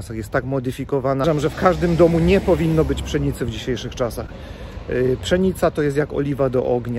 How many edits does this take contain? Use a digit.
1